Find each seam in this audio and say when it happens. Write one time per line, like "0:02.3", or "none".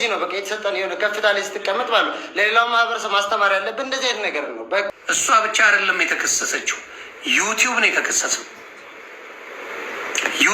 0:04.9